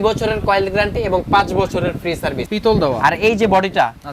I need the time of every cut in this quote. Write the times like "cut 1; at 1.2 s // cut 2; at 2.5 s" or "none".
cut 1; at 2.4 s

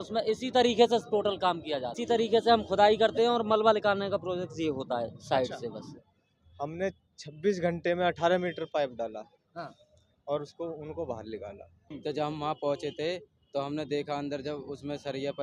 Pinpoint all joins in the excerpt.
cut 1; at 1.9 s // cut 2; at 6.1 s // cut 3; at 11.8 s

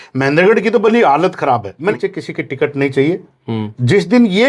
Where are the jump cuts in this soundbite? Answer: cut 1; at 2.0 s

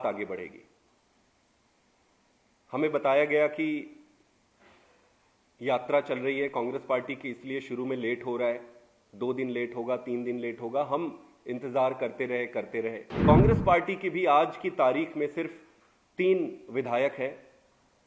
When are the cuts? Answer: cut 1; at 13.1 s

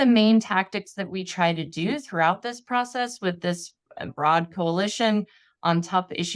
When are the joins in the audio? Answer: cut 1; at 4.1 s

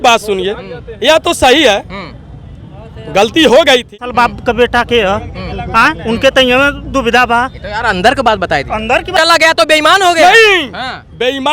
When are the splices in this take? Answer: cut 1; at 4.1 s // cut 2; at 9.1 s

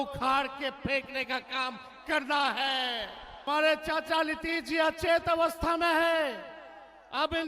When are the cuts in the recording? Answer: cut 1; at 3.3 s

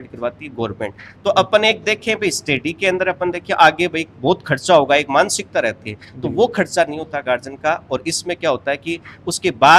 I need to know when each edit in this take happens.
none

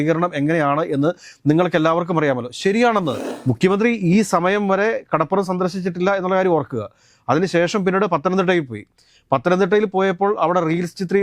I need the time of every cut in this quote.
cut 1; at 3.2 s

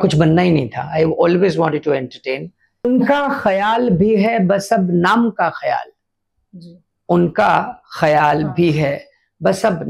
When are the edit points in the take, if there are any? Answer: cut 1; at 2.8 s

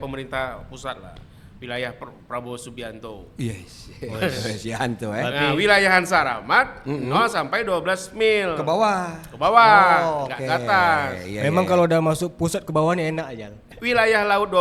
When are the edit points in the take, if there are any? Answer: none

